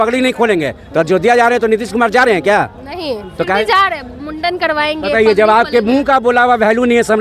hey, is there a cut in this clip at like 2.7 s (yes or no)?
no